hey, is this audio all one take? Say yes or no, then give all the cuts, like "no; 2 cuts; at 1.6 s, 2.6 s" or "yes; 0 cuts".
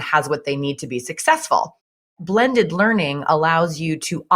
no; 1 cut; at 2.2 s